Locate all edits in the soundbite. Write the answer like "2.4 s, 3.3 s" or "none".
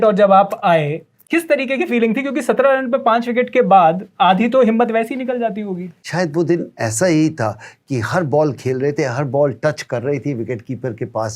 1.2 s, 6.0 s